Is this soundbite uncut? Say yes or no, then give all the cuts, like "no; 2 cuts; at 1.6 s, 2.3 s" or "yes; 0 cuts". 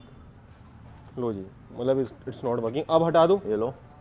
yes; 0 cuts